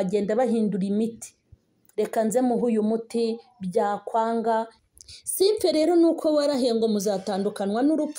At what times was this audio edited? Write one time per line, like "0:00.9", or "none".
0:04.8